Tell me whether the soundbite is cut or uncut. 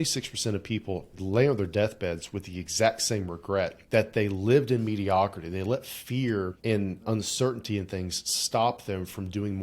cut